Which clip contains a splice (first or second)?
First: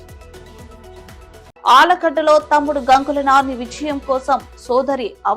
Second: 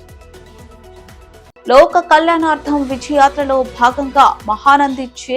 second